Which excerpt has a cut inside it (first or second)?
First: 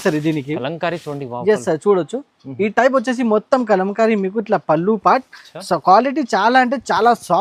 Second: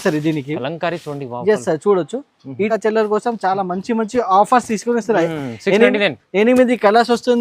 second